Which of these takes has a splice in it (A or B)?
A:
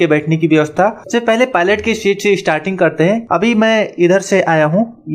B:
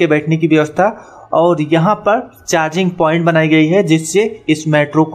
A